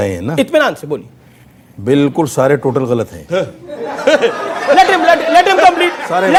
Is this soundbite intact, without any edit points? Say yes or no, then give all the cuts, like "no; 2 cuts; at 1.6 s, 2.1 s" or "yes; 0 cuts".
yes; 0 cuts